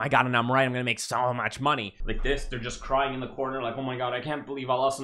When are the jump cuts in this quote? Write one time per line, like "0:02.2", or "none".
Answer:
0:02.0